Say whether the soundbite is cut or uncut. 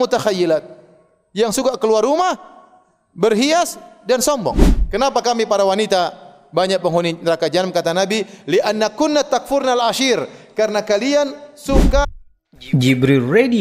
cut